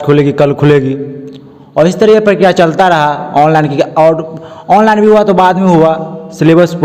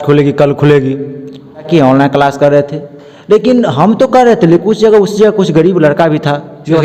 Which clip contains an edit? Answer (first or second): second